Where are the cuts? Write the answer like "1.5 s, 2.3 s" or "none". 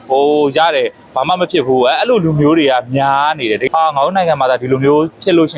3.6 s